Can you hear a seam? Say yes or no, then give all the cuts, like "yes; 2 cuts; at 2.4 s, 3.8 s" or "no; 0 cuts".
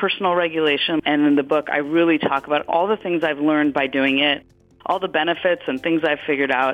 yes; 2 cuts; at 1.0 s, 2.7 s